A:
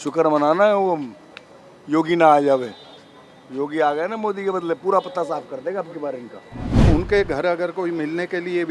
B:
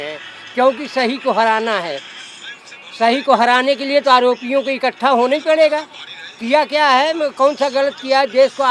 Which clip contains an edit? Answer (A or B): A